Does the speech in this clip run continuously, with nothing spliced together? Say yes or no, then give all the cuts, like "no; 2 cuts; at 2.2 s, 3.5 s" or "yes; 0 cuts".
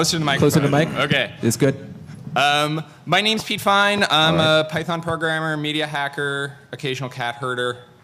yes; 0 cuts